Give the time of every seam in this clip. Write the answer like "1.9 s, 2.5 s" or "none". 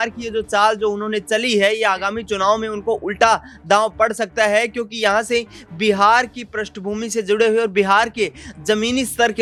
none